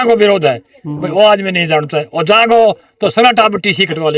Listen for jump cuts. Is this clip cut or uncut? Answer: uncut